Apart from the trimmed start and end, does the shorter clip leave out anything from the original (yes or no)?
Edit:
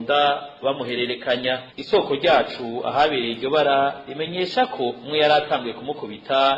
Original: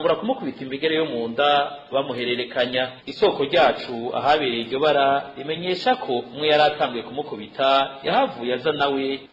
no